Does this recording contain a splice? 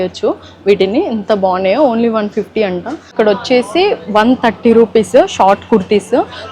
yes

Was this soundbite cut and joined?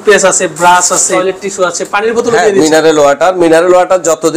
yes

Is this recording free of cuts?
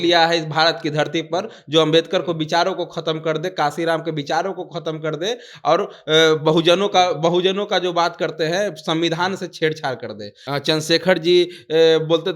no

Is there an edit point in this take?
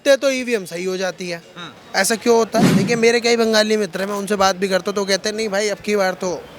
yes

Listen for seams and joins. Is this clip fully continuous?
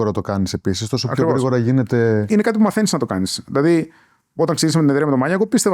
no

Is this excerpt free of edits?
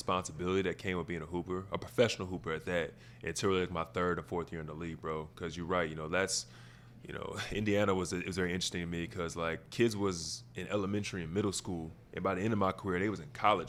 yes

